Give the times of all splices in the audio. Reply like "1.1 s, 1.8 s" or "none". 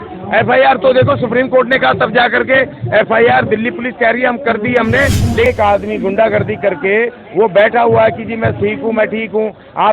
5.4 s